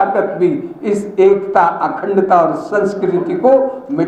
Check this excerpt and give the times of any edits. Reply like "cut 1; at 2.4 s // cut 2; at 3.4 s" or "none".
none